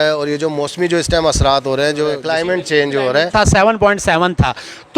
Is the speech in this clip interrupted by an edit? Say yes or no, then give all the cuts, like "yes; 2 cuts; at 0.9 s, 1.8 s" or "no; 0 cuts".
yes; 1 cut; at 3.3 s